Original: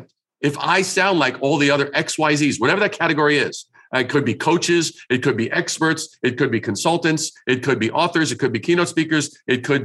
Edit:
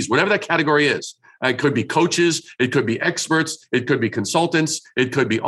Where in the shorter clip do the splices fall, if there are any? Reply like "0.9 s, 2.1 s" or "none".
none